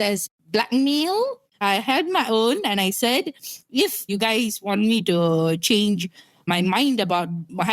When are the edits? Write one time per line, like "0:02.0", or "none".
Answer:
0:01.5